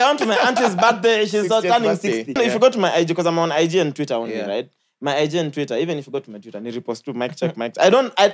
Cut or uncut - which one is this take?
cut